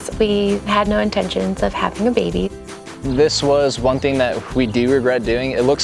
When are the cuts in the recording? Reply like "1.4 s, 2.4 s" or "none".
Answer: 2.8 s